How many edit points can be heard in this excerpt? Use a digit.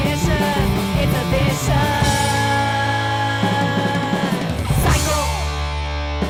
0